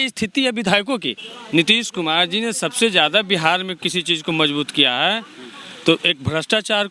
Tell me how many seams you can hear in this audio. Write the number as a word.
one